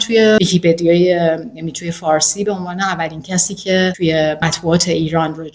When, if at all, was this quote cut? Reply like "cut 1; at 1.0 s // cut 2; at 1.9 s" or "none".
cut 1; at 4.1 s